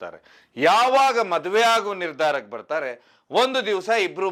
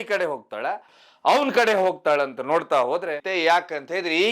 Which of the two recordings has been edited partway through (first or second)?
second